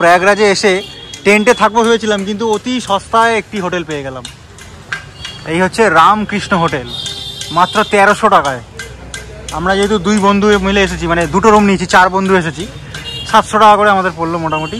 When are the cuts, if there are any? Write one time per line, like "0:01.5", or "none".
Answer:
none